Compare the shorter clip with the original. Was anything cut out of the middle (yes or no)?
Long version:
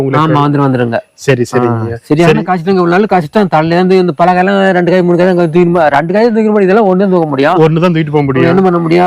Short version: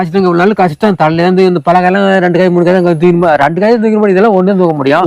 no